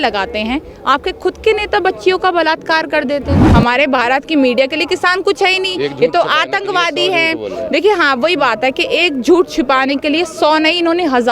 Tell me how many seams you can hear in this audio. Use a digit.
1